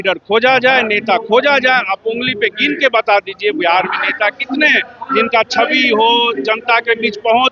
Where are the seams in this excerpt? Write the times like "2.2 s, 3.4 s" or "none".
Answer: none